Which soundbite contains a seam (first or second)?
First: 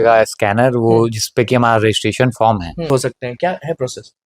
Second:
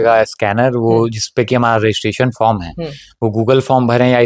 first